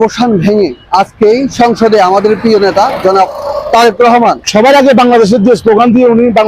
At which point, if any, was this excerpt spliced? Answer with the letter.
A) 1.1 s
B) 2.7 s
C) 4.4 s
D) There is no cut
C